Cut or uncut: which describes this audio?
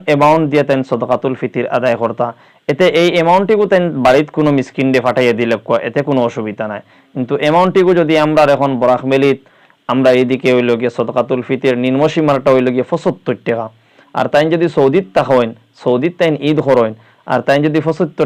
uncut